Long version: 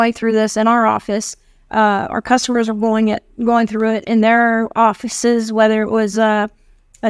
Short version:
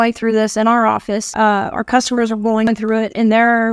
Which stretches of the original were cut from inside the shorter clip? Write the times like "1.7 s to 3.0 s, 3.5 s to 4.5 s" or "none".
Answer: 1.3 s to 1.6 s, 3.0 s to 3.6 s